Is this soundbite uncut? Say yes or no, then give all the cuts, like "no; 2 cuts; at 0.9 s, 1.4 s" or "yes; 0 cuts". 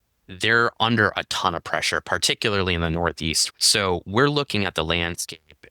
no; 1 cut; at 3.4 s